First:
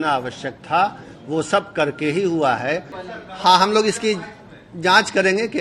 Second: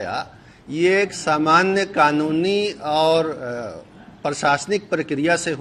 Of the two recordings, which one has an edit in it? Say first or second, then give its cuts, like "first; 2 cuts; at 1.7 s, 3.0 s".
first; 1 cut; at 3.0 s